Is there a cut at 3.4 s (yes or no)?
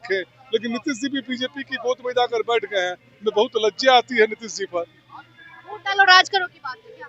no